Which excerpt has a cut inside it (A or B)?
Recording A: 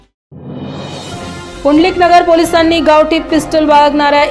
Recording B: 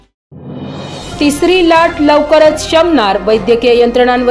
A